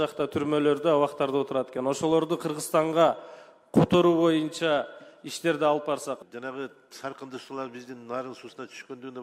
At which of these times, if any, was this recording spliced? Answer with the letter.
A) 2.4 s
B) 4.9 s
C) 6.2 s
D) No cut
C